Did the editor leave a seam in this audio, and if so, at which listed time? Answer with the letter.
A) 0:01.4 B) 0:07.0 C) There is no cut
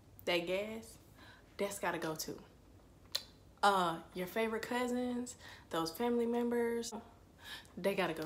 B